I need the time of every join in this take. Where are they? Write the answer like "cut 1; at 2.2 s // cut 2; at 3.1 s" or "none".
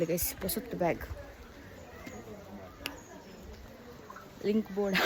none